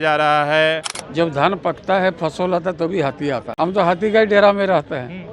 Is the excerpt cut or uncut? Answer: cut